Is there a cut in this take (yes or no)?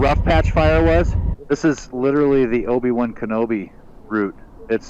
yes